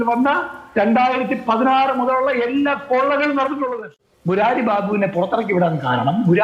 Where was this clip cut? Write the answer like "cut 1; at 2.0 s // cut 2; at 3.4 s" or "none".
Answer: cut 1; at 3.9 s